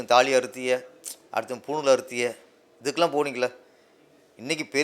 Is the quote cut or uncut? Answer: uncut